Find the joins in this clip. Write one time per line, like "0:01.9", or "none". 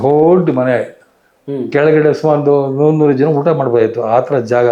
none